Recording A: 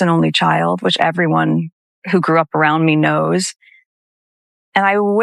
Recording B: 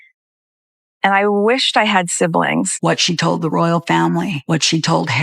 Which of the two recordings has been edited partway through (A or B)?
B